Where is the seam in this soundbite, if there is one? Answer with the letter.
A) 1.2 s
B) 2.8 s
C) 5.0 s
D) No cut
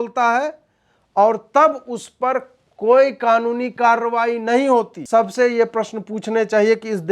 C